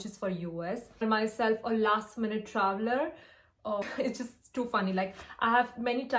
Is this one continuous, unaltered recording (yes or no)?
no